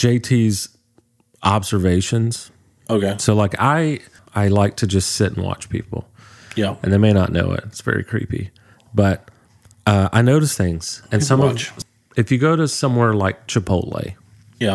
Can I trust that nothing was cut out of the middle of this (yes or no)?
no